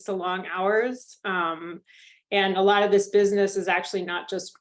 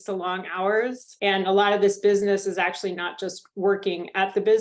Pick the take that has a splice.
second; 1 cut; at 1.1 s

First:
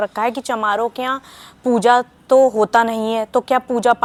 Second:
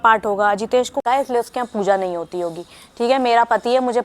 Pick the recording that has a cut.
second; 1 cut; at 1.0 s

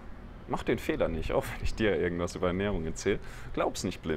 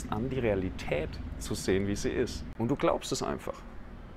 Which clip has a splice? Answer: second; 1 cut; at 2.4 s

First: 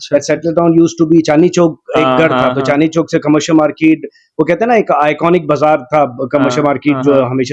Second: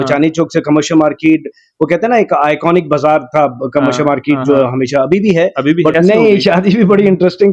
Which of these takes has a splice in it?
second; 1 cut; at 5.9 s

